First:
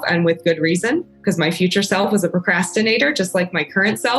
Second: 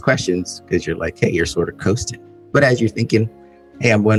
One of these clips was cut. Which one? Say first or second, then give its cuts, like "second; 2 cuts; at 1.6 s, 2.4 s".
first; 1 cut; at 1.1 s